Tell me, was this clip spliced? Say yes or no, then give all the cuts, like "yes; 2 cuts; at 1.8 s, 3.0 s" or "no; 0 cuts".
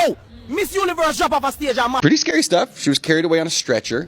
yes; 1 cut; at 2.0 s